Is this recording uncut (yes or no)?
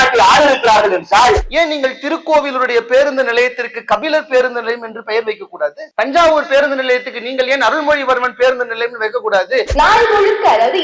no